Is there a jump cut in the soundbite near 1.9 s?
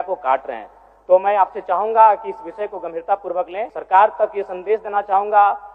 no; 1 cut; at 3.7 s

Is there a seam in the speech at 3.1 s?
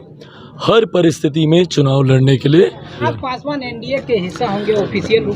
yes; 1 cut; at 3.1 s

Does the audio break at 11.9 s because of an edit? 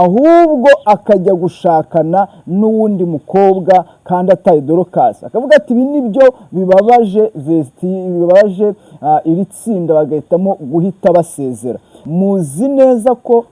yes; 1 cut; at 11.9 s

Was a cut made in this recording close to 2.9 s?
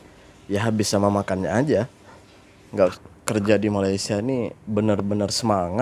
yes; 1 cut; at 2.9 s

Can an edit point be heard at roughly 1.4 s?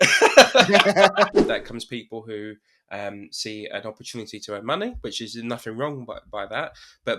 yes; 1 cut; at 1.4 s

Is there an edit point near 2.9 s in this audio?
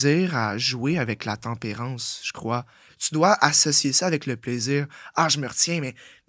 yes; 1 cut; at 2.9 s

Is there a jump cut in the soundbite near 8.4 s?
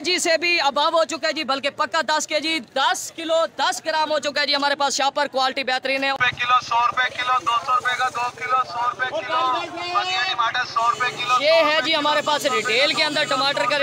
no; 1 cut; at 6.2 s

